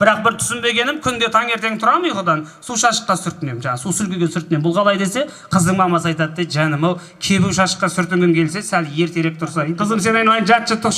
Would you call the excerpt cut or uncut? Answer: cut